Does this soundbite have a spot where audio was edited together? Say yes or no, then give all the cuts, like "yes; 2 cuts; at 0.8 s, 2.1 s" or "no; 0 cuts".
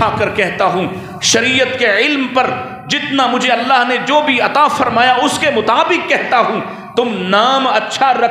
no; 0 cuts